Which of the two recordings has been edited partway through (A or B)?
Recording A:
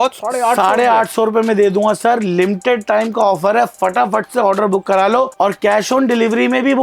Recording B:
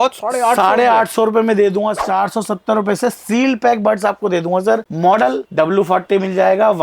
B